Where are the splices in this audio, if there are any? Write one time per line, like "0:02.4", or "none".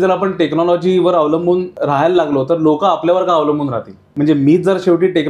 0:01.7
0:04.0